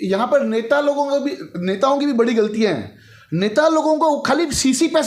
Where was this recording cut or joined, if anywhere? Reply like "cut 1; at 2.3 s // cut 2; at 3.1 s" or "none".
none